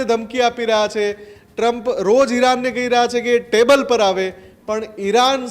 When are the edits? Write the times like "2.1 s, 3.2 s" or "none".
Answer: none